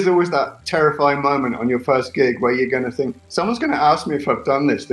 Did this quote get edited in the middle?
no; 0 cuts

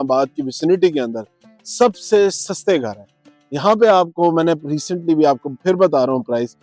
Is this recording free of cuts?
yes; 0 cuts

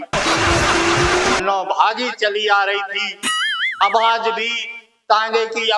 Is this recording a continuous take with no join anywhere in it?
no; 1 cut; at 1.4 s

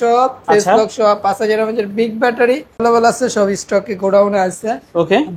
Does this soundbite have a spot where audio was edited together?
yes; 1 cut; at 2.8 s

